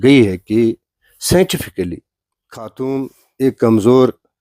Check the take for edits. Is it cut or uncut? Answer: cut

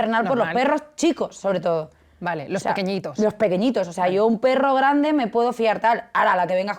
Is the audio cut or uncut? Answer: uncut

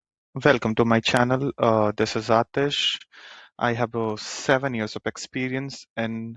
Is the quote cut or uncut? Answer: uncut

